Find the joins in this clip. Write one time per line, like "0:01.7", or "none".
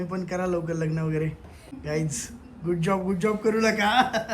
0:01.7